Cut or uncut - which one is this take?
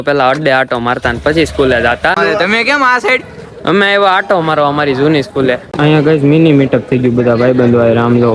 cut